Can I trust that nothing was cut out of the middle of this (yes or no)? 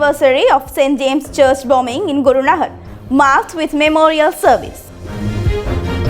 no